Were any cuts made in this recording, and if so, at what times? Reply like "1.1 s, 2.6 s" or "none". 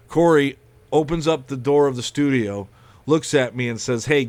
none